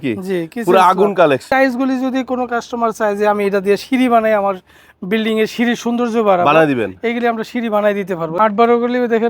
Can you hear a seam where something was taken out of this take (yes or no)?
yes